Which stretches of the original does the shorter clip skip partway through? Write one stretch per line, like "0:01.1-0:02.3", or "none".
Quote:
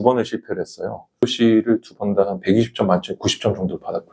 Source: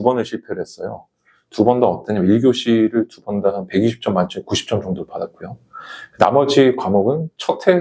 0:01.2-0:02.5